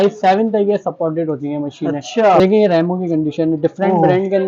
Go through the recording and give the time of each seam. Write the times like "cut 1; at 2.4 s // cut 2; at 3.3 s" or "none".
cut 1; at 2.4 s